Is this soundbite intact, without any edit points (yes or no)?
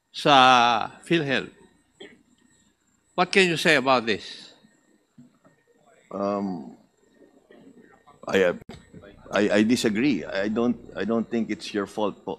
yes